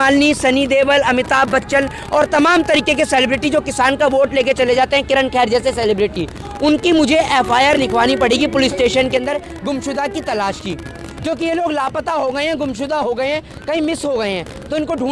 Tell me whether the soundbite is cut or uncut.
uncut